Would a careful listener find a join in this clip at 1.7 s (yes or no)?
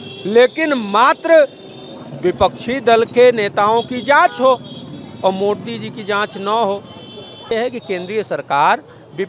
no